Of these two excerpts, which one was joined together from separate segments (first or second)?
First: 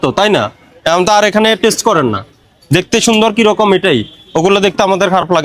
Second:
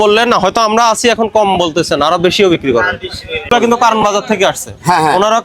second